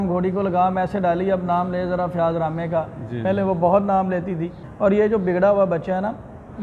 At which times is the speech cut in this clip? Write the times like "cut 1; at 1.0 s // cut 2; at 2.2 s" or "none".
cut 1; at 4.6 s